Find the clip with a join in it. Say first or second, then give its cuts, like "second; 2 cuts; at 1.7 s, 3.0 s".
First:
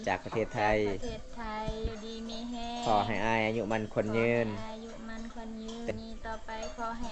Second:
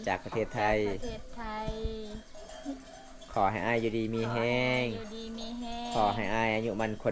first; 2 cuts; at 1.9 s, 5.9 s